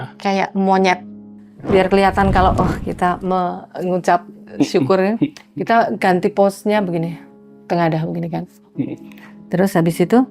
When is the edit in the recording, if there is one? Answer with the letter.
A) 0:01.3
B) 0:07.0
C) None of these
A